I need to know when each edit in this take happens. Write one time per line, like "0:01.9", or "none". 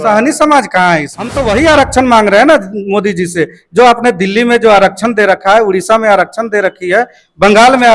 0:01.4